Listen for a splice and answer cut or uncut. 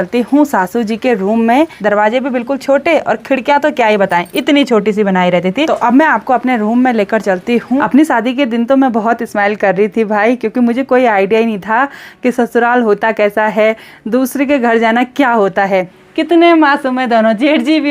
cut